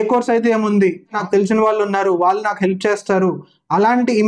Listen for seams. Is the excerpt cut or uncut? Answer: cut